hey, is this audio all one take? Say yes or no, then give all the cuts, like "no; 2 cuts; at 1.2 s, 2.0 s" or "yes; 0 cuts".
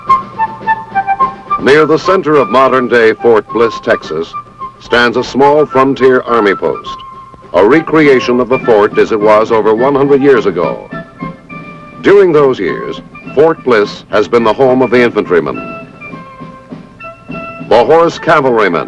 no; 1 cut; at 1.7 s